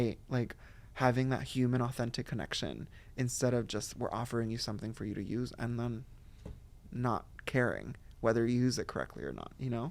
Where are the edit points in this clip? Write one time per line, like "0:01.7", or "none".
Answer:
none